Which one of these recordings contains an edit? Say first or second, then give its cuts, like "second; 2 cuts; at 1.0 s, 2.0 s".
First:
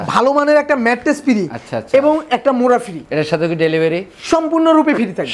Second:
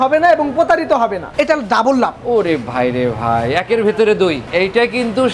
second; 2 cuts; at 1.2 s, 4.4 s